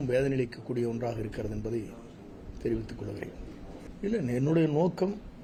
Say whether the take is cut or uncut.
uncut